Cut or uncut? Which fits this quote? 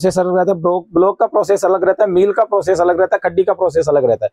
uncut